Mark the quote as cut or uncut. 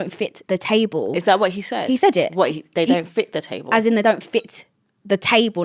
uncut